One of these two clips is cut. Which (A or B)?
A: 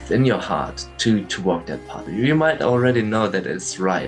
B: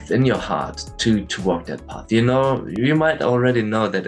A